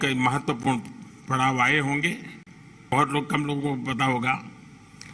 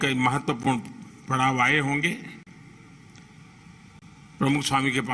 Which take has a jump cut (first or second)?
first